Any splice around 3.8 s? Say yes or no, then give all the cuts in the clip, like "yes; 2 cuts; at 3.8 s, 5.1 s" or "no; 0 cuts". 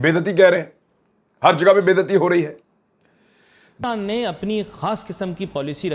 yes; 1 cut; at 3.8 s